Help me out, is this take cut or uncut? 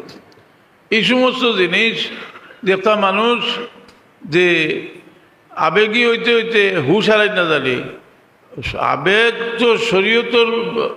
uncut